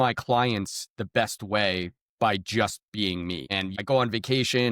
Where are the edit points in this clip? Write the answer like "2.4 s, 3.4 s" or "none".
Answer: 3.8 s